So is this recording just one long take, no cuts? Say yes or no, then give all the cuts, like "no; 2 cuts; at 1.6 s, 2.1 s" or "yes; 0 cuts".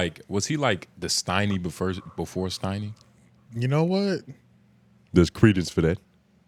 yes; 0 cuts